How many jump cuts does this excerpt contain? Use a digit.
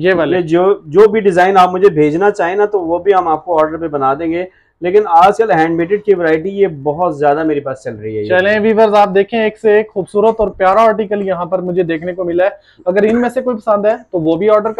0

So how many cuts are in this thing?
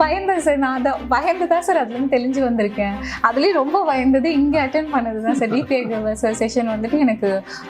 0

